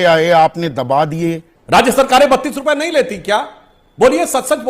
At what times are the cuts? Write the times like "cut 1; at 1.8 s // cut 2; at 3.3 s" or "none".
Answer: cut 1; at 1.5 s

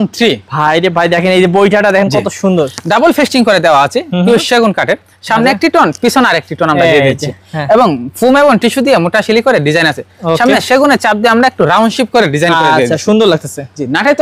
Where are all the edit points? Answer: none

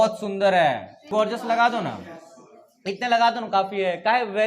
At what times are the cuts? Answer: cut 1; at 1.1 s

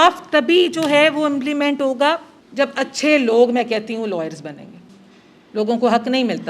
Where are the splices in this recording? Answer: cut 1; at 2.4 s // cut 2; at 4.6 s

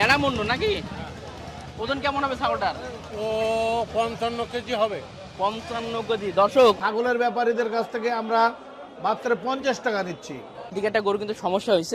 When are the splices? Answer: cut 1; at 6.8 s // cut 2; at 10.6 s

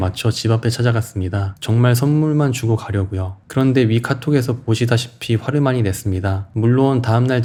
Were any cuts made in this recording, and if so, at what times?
none

